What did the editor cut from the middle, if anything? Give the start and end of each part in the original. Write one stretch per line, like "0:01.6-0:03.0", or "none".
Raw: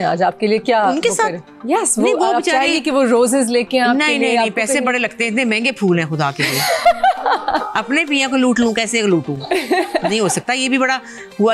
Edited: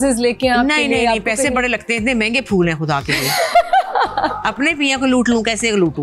none

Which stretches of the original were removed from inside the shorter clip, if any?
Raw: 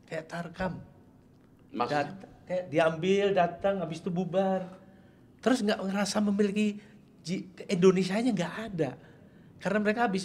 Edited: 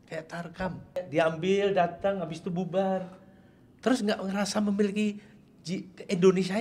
0:01.0-0:02.6

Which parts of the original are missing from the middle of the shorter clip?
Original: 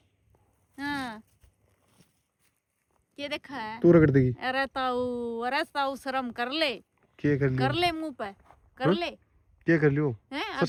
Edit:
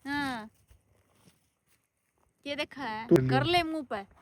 0:03.9-0:07.4

